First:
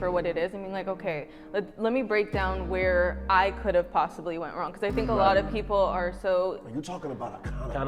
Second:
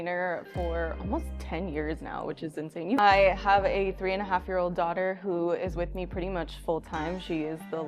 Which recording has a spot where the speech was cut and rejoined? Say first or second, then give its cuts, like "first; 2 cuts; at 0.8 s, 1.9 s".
second; 1 cut; at 3.0 s